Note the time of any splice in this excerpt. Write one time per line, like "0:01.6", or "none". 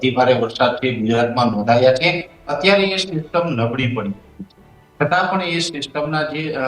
none